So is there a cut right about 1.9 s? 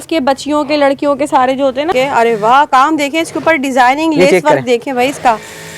yes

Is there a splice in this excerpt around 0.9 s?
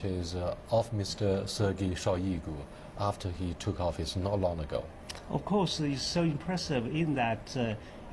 no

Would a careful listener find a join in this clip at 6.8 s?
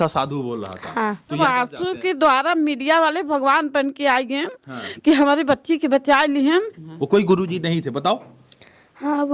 yes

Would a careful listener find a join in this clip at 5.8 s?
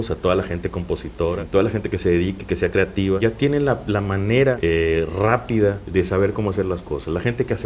yes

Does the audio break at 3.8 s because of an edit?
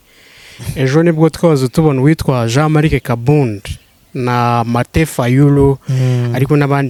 no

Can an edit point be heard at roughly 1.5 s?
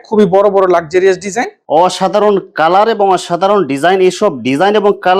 yes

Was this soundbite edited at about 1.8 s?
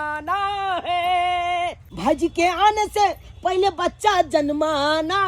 yes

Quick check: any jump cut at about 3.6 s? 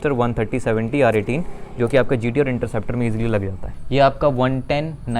yes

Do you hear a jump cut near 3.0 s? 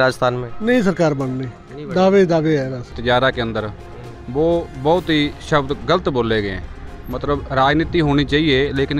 yes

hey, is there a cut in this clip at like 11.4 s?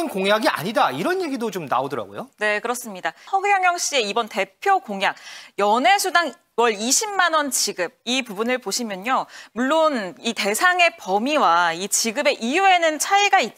no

